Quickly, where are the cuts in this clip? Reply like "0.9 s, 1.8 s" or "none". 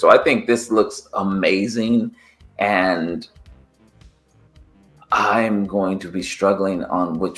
none